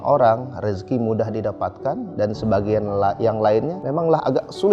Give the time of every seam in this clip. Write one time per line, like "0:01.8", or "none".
0:03.8

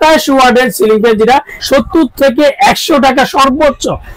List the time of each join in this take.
0:01.5

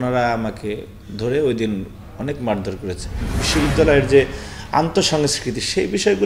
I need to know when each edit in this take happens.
0:03.4

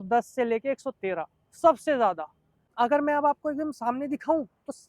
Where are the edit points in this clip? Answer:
0:02.7

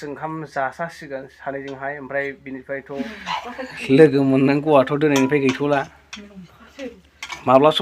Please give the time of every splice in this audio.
0:02.9

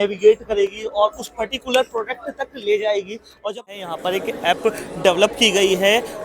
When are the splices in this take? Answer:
0:03.6

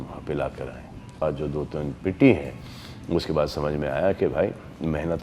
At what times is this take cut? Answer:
0:01.2

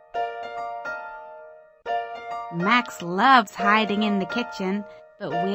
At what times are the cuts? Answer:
0:01.1
0:02.1

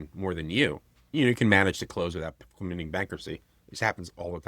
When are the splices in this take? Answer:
0:01.1

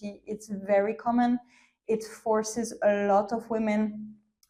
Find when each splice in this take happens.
none

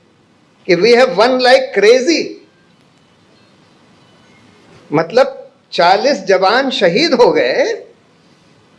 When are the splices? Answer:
none

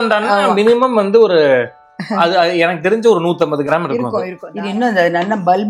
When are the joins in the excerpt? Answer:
0:04.4

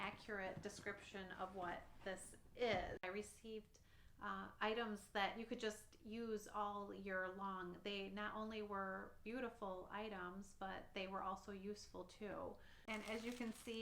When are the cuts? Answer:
0:03.0
0:12.8

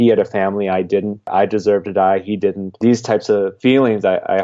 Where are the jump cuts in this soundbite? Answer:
0:01.3
0:02.7
0:03.5

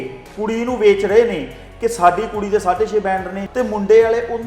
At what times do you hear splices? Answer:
0:03.4

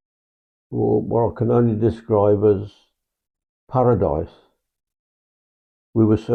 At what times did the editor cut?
none

